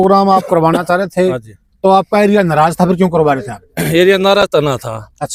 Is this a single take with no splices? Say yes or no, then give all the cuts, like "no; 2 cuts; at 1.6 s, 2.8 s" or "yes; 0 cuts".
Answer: yes; 0 cuts